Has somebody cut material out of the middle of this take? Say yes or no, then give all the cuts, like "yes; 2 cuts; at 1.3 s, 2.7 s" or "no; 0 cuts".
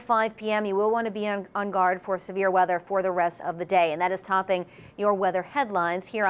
no; 0 cuts